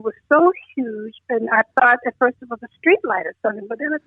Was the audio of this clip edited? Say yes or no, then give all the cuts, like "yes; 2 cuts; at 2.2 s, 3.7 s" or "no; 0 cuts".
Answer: no; 0 cuts